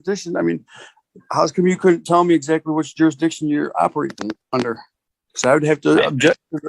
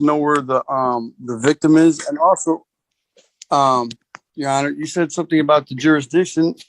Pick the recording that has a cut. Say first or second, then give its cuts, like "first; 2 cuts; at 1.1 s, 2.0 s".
first; 1 cut; at 5.0 s